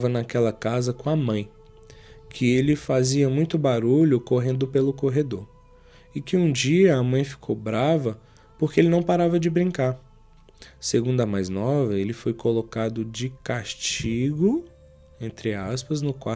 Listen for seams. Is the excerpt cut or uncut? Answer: uncut